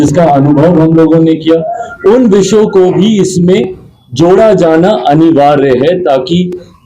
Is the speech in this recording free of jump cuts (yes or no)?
yes